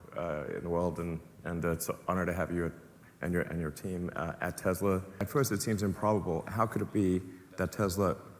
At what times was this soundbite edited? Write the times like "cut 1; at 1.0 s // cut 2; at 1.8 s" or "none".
cut 1; at 5.2 s